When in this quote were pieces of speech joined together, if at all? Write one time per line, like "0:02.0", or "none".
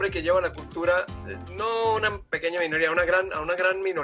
none